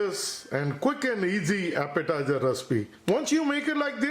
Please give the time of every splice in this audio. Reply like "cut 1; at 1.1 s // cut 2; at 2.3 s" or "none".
cut 1; at 3.0 s